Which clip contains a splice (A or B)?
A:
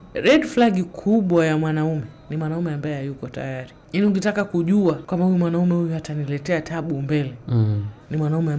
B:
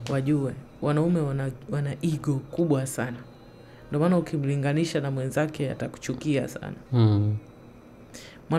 A